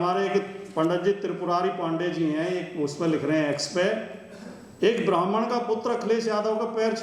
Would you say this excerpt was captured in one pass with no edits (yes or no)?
yes